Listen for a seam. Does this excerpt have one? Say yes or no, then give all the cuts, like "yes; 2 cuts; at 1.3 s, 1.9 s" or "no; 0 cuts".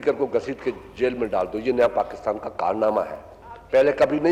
no; 0 cuts